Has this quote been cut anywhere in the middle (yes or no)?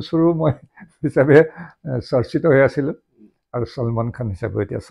no